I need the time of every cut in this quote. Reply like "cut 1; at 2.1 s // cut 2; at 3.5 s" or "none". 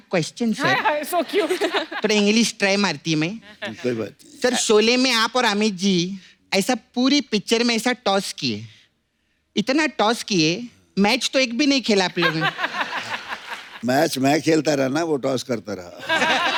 none